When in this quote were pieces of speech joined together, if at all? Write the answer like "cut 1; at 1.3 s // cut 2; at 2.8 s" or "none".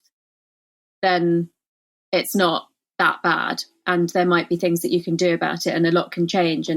none